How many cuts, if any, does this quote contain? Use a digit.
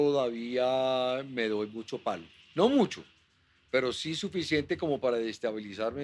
1